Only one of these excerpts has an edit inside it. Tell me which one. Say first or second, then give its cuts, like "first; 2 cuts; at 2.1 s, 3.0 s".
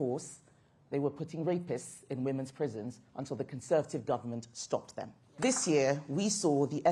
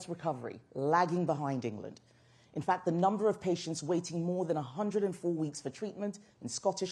first; 1 cut; at 5.2 s